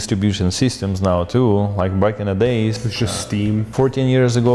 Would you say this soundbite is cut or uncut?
uncut